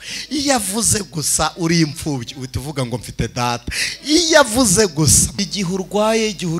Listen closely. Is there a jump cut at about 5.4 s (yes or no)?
yes